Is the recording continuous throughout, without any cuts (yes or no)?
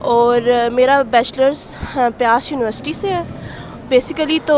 yes